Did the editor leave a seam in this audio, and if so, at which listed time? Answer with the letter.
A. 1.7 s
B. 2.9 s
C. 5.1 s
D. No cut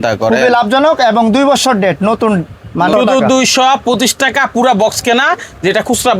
B